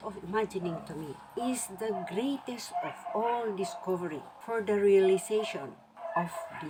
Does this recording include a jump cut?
no; 0 cuts

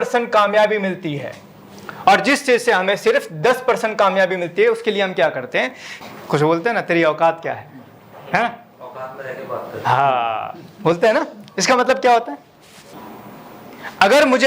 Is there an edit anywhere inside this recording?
yes; 2 cuts; at 5.9 s, 12.9 s

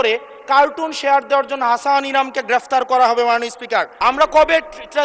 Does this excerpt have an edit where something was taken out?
yes; 1 cut; at 4.0 s

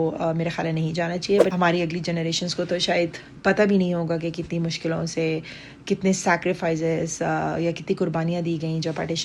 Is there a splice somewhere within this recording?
yes; 1 cut; at 1.5 s

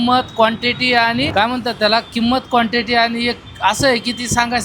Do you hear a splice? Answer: yes; 1 cut; at 1.3 s

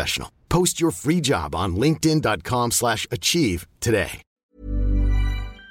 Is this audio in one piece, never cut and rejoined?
no; 1 cut; at 4.2 s

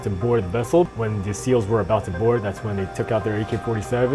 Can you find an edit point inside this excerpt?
yes; 1 cut; at 0.9 s

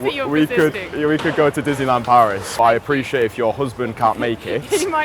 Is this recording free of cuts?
no; 1 cut; at 2.5 s

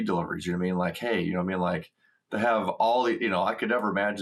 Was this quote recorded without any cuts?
yes; 0 cuts

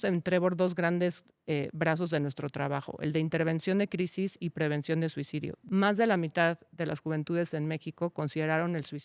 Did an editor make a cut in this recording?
yes; 1 cut; at 5.6 s

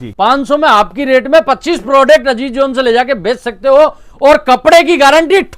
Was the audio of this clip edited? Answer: no; 0 cuts

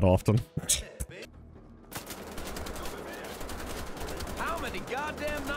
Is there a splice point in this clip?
no; 0 cuts

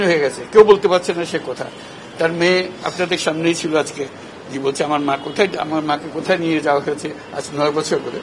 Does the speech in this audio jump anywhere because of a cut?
no; 0 cuts

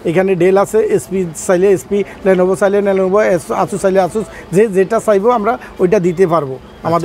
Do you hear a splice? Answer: no; 0 cuts

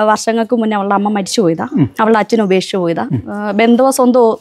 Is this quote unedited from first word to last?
yes; 0 cuts

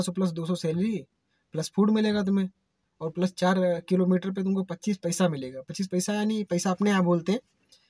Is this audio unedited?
yes; 0 cuts

